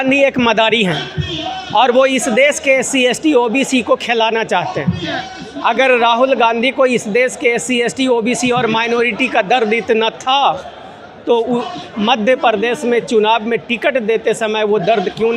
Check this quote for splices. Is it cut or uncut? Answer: uncut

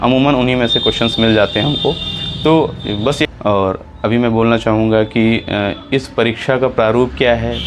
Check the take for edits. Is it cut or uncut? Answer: cut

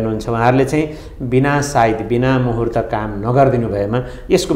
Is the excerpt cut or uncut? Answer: uncut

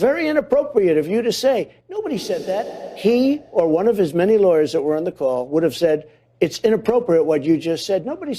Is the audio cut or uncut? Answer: cut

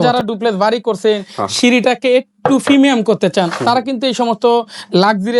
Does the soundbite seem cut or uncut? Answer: uncut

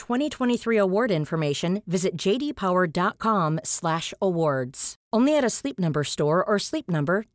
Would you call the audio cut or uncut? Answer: uncut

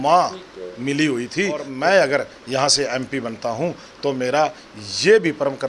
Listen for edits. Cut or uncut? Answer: cut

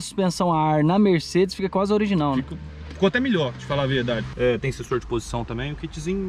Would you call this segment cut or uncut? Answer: cut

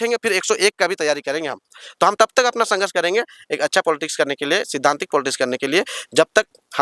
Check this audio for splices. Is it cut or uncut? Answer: uncut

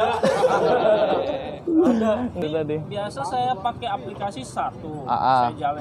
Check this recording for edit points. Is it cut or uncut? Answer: cut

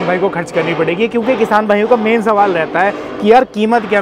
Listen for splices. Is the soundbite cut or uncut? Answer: uncut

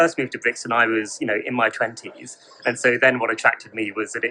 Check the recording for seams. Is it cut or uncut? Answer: uncut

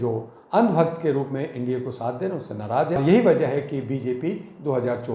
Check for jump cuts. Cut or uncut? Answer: cut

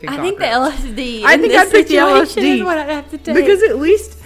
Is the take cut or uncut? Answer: uncut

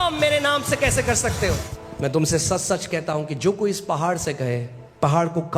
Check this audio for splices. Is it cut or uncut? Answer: cut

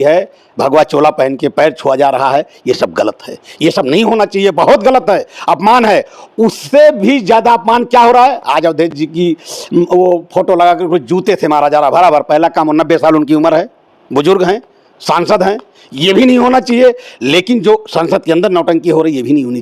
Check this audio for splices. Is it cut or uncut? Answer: uncut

